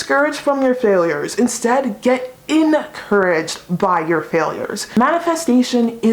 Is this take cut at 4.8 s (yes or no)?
yes